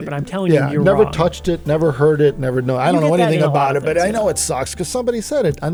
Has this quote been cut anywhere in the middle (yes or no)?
no